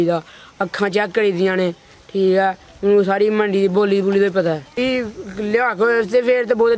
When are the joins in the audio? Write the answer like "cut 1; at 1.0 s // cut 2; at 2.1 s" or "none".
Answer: cut 1; at 4.8 s